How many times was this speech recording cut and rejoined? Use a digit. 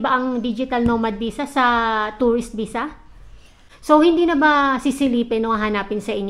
1